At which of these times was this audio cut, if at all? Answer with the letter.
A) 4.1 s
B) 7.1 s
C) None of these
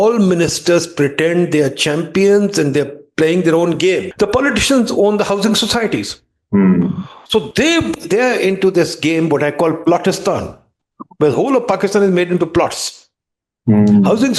A